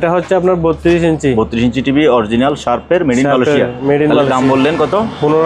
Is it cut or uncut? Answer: uncut